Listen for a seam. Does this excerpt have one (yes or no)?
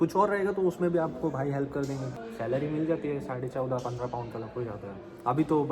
yes